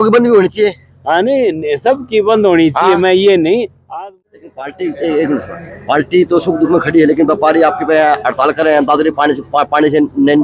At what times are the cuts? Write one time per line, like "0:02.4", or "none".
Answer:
0:03.9